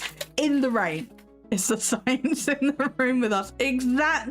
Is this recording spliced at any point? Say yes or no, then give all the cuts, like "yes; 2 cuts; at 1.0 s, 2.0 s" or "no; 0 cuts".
yes; 1 cut; at 1.3 s